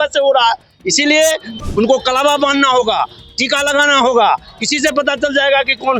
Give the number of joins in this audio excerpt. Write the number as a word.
one